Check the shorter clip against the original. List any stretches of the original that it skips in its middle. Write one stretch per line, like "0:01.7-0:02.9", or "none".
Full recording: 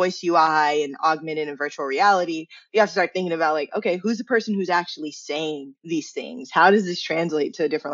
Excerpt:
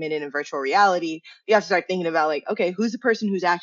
none